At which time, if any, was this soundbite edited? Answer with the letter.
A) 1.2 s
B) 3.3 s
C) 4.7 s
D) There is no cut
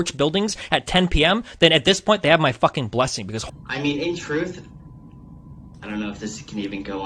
B